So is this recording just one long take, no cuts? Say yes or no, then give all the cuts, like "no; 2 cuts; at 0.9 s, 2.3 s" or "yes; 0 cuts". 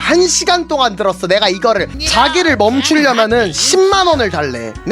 no; 1 cut; at 1.9 s